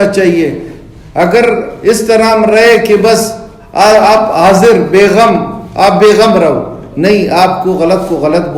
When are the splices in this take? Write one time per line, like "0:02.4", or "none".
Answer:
none